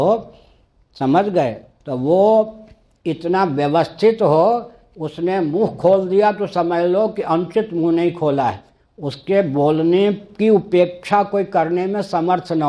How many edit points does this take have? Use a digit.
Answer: 0